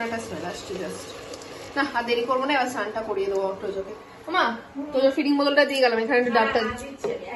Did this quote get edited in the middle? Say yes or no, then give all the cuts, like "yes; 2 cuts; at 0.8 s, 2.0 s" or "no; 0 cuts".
no; 0 cuts